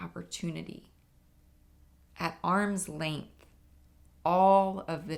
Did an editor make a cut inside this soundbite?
no; 0 cuts

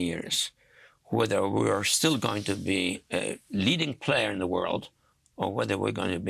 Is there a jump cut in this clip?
no; 0 cuts

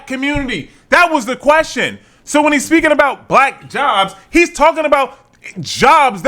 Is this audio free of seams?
yes; 0 cuts

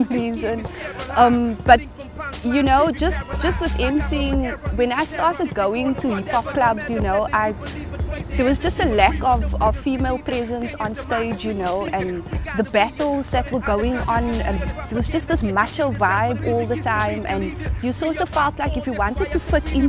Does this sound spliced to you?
no; 0 cuts

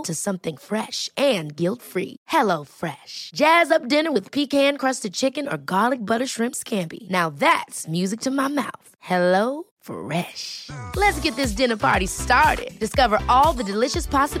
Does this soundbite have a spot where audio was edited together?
no; 0 cuts

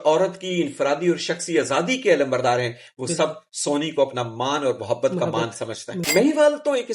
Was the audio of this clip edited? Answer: yes; 1 cut; at 5.9 s

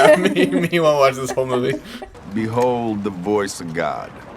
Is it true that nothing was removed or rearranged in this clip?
no; 1 cut; at 2.2 s

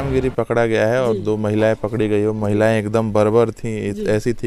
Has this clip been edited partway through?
no; 0 cuts

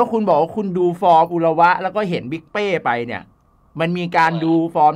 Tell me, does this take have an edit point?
no; 0 cuts

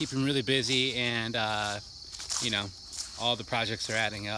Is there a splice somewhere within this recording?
no; 0 cuts

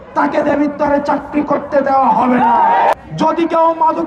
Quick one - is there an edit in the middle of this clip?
yes; 1 cut; at 3.0 s

